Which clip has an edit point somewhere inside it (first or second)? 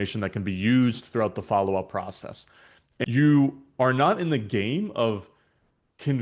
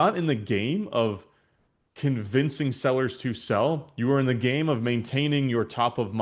first